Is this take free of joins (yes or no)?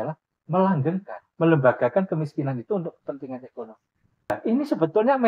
no